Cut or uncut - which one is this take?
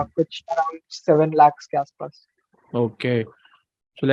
uncut